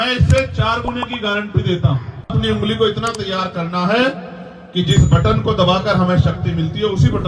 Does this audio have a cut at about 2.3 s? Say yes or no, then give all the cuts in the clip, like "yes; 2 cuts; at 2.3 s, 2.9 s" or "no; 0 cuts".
yes; 1 cut; at 2.3 s